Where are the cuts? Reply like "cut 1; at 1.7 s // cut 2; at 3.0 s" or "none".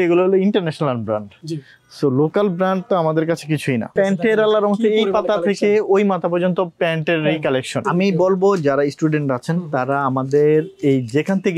cut 1; at 3.9 s // cut 2; at 7.9 s